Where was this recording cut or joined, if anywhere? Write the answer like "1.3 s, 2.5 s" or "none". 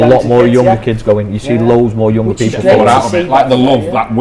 none